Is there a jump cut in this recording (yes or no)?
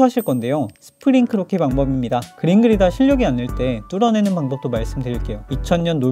yes